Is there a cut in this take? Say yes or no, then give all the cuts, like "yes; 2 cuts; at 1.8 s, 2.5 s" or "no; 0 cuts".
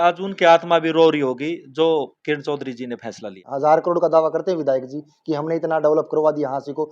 yes; 1 cut; at 3.4 s